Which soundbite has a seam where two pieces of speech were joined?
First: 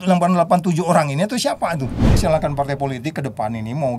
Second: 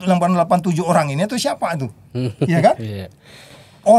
first; 1 cut; at 2.1 s

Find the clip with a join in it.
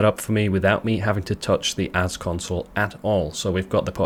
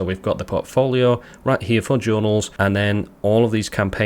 second; 1 cut; at 2.5 s

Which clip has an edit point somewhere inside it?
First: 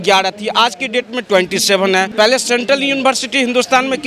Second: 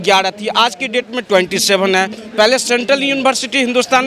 first; 1 cut; at 2.1 s

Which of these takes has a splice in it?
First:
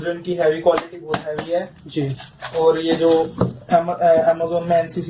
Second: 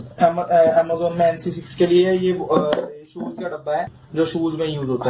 second; 1 cut; at 4.0 s

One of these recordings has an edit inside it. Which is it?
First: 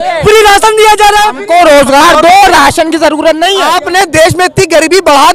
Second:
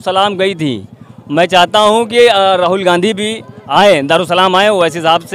first; 2 cuts; at 1.4 s, 3.7 s

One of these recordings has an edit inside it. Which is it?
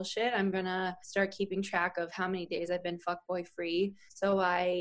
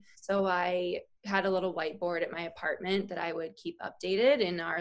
first; 1 cut; at 1.0 s

